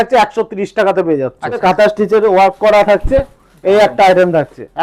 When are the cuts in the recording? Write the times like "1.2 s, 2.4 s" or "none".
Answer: 1.6 s